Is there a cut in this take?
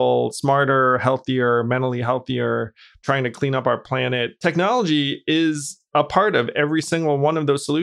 yes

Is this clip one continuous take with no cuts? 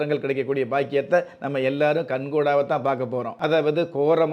no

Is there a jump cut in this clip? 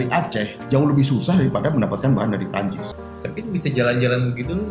yes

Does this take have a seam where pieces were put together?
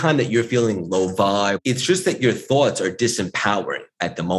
yes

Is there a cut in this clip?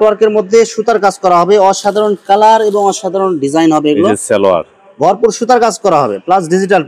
no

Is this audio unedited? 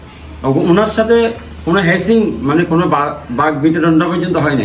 yes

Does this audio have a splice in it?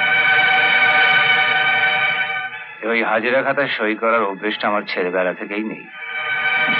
no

